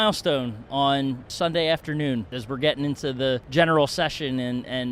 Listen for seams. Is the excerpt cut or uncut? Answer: cut